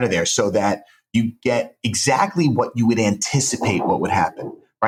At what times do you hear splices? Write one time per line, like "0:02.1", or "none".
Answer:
none